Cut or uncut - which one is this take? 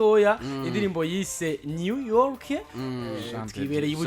uncut